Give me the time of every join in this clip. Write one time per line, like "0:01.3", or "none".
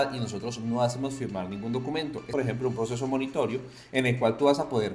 0:02.3

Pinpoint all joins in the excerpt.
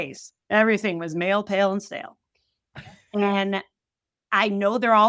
none

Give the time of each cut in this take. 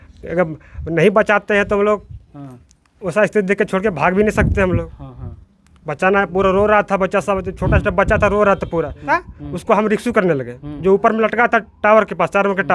0:09.0

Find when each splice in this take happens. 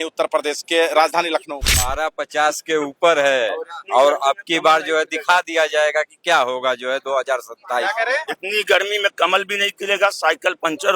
0:01.7

